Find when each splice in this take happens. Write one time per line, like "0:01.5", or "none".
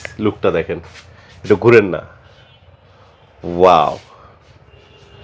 none